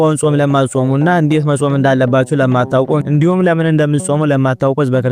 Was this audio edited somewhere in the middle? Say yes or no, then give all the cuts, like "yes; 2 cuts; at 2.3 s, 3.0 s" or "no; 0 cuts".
no; 0 cuts